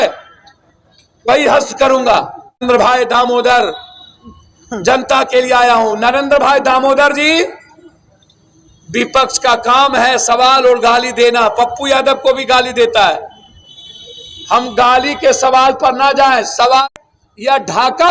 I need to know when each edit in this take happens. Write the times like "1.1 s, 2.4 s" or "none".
2.6 s, 16.8 s